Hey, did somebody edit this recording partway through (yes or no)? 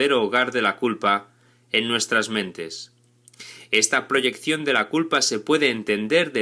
no